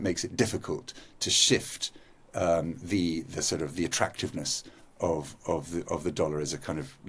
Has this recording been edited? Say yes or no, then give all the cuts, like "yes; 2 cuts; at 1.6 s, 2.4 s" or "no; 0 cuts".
no; 0 cuts